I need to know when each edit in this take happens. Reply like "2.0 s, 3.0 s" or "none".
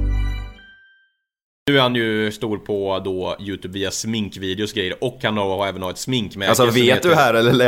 1.5 s